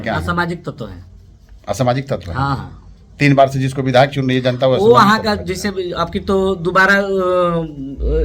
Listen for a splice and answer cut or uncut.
uncut